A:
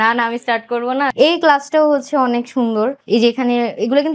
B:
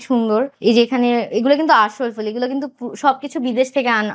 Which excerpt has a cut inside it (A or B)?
A